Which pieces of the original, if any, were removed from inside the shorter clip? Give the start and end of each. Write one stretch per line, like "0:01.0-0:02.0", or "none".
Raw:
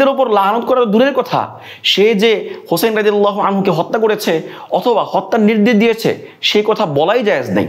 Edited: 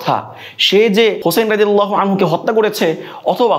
0:02.4-0:02.6